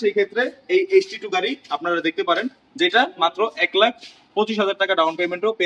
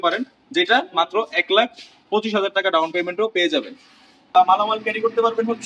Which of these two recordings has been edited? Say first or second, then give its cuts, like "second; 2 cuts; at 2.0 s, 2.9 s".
second; 1 cut; at 4.3 s